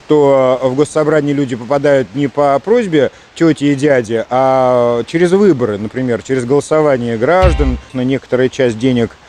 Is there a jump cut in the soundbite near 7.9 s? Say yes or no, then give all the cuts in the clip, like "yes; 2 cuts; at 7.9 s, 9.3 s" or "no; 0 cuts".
yes; 1 cut; at 7.9 s